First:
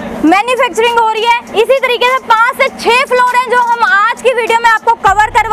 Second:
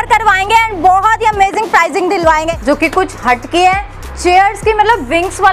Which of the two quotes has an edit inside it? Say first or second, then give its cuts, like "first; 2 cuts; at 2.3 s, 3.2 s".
second; 1 cut; at 2.5 s